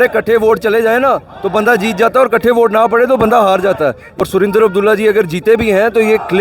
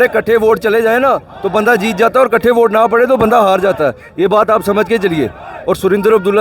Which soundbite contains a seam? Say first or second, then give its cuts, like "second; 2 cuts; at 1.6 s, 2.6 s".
first; 1 cut; at 3.7 s